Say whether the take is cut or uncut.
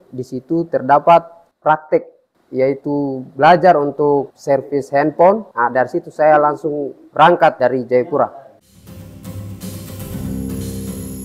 uncut